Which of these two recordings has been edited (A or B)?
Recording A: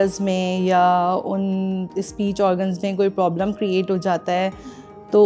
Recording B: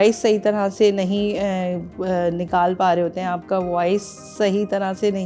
B